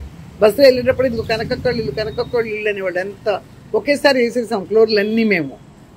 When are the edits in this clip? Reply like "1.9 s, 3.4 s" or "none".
none